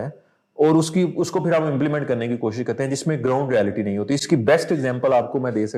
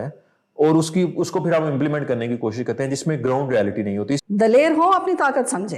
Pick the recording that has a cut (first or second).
second